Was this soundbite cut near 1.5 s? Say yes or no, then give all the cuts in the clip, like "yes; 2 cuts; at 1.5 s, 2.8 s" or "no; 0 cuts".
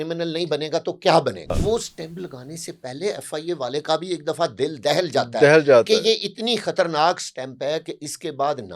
yes; 1 cut; at 1.5 s